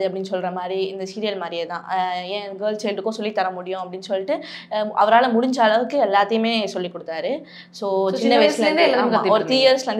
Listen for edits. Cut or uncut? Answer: uncut